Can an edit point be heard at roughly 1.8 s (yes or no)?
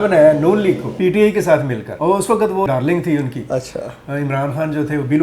yes